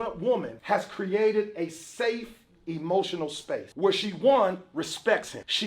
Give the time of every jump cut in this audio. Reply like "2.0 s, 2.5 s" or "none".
3.7 s